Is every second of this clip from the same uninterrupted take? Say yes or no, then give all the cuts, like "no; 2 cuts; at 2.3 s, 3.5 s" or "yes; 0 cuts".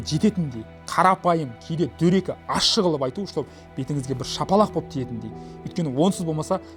yes; 0 cuts